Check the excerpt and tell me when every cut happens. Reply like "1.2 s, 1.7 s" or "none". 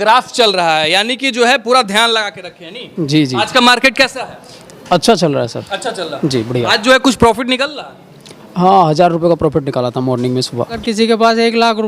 10.8 s